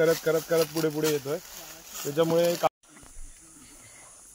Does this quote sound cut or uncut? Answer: cut